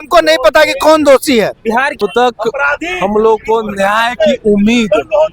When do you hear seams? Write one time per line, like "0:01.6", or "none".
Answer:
0:02.0